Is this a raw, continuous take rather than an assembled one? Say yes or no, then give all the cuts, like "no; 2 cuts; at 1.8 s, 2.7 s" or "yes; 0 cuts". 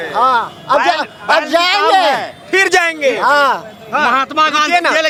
yes; 0 cuts